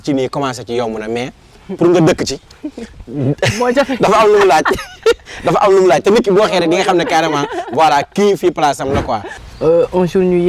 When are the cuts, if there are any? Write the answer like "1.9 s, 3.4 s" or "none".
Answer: 9.3 s